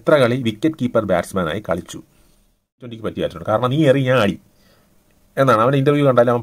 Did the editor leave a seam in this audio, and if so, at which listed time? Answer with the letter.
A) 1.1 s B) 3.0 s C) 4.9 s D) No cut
B